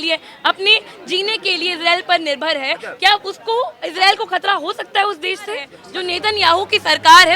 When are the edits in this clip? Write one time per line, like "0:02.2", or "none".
0:03.8
0:05.8